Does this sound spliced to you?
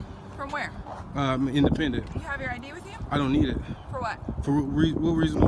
no; 0 cuts

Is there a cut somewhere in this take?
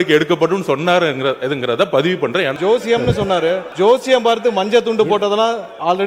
yes; 2 cuts; at 2.5 s, 3.7 s

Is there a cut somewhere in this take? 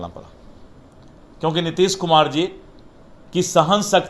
no; 0 cuts

